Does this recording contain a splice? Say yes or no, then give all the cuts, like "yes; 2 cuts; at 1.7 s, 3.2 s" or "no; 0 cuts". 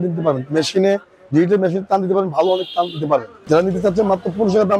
yes; 1 cut; at 3.3 s